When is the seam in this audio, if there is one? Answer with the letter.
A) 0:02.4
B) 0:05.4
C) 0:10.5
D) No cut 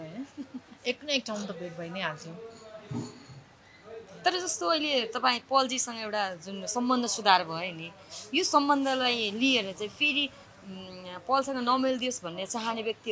D